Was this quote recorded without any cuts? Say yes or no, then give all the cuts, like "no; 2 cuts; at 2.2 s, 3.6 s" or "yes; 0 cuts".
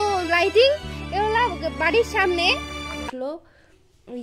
no; 1 cut; at 3.1 s